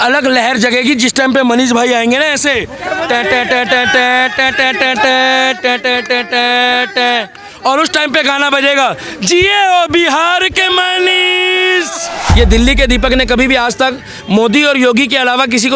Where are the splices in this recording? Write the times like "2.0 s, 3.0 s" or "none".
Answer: 12.2 s